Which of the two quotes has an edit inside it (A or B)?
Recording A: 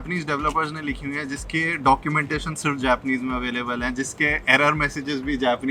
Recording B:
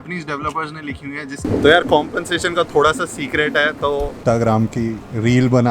B